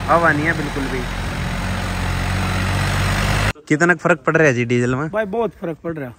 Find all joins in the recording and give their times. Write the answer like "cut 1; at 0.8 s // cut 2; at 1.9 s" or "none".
cut 1; at 3.5 s